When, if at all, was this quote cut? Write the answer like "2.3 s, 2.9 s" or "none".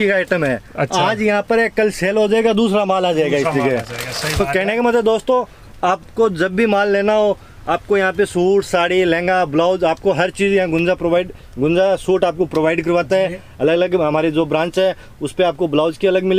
none

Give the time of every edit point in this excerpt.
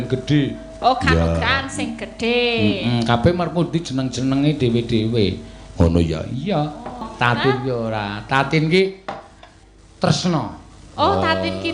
7.1 s

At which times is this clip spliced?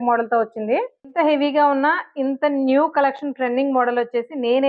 1.1 s

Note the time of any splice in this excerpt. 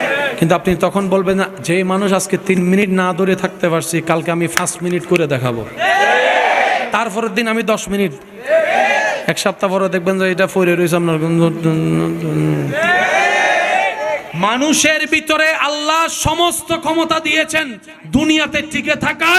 none

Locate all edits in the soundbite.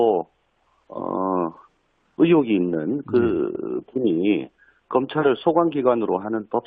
none

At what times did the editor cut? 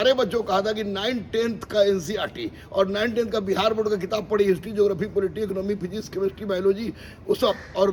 none

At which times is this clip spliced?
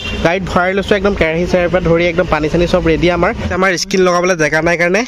3.4 s

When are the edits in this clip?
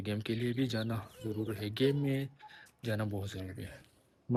none

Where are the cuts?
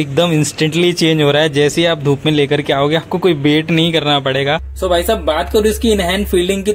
4.7 s

